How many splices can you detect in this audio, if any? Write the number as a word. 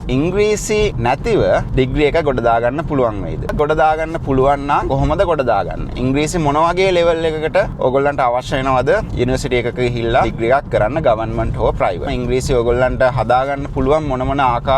nine